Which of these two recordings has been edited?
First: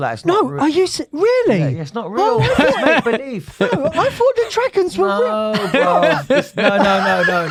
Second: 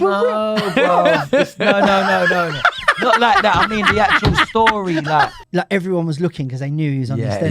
second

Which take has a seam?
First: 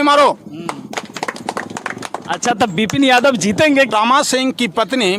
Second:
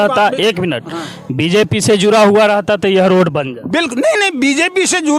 first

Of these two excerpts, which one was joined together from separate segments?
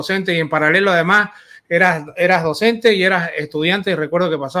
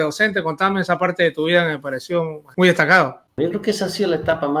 second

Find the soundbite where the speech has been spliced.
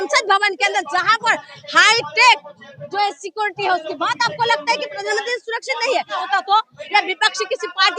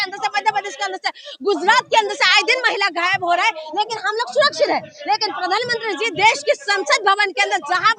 first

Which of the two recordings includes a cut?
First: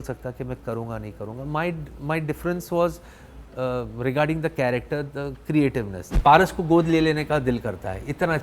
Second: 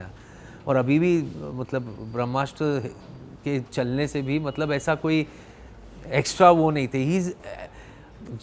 first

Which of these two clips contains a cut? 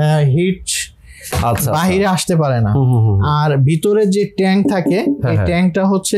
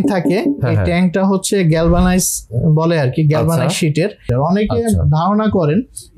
second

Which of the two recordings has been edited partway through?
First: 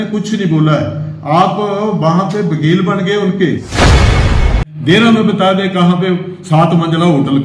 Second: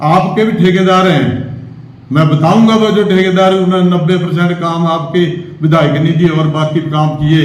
first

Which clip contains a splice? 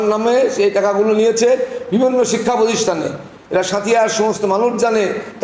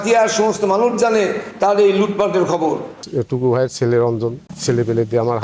second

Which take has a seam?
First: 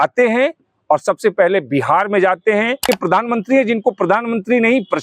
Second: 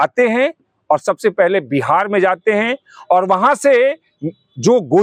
first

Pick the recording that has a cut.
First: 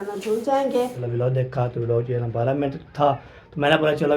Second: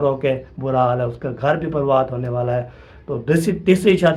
first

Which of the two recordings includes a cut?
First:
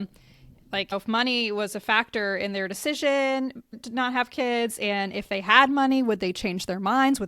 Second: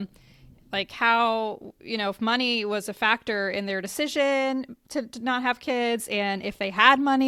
first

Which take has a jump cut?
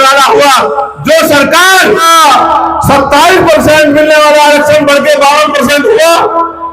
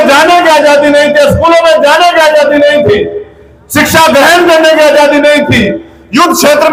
first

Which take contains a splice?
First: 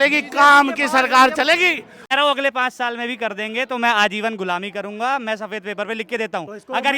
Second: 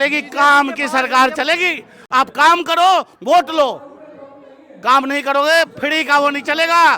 first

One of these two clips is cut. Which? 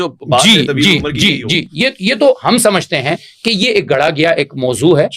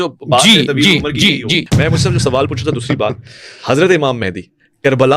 second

